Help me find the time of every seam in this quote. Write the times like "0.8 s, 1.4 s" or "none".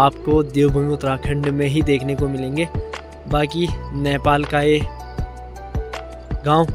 none